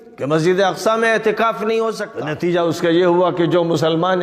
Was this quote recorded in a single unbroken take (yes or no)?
no